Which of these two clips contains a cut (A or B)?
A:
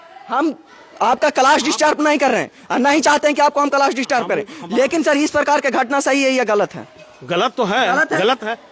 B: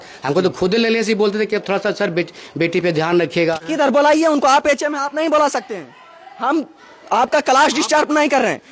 B